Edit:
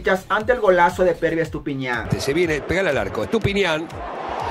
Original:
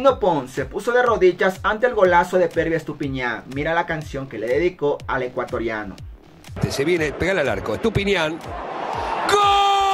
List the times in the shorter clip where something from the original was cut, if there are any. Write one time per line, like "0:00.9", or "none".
0:02.0